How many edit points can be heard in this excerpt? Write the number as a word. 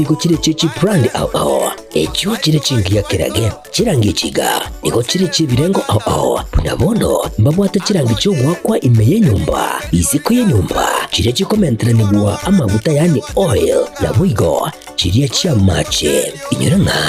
one